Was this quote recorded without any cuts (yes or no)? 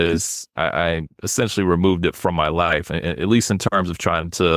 yes